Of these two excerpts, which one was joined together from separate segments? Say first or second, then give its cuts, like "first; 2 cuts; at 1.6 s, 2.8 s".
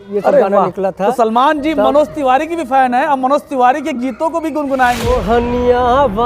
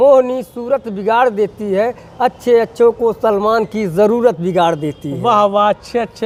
first; 1 cut; at 5.0 s